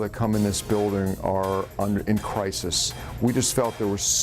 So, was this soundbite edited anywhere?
yes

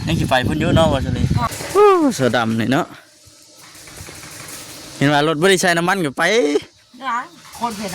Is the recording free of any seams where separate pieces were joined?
no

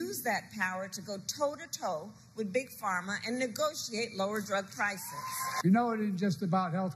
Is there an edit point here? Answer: yes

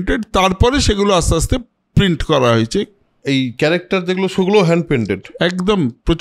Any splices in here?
no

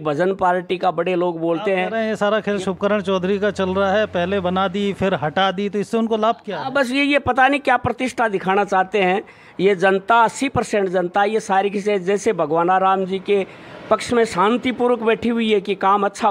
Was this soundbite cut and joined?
no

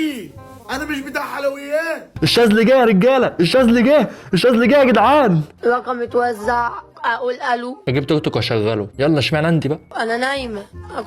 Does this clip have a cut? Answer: yes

